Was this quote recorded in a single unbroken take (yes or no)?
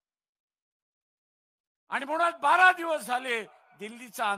yes